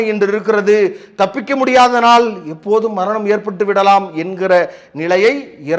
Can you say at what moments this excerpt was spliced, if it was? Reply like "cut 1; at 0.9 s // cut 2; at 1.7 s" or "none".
none